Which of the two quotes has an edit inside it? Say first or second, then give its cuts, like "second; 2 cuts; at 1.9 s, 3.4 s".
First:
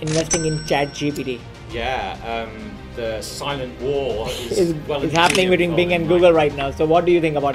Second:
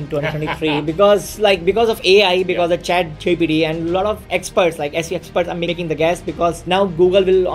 second; 3 cuts; at 4.3 s, 5.7 s, 6.6 s